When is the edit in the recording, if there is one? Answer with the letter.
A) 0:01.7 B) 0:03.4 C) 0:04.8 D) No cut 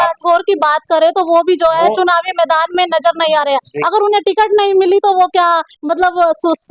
D